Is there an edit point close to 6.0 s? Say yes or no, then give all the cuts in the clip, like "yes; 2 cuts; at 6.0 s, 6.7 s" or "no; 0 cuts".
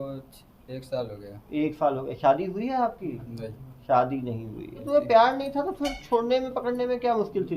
no; 1 cut; at 4.8 s